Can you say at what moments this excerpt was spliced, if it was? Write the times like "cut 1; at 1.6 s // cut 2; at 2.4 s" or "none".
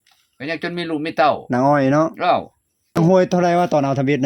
cut 1; at 3.0 s